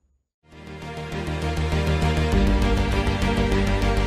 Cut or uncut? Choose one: uncut